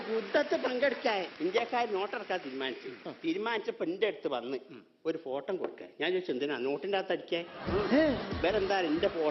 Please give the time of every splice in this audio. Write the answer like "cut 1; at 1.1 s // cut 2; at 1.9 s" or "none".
cut 1; at 1.3 s // cut 2; at 8.3 s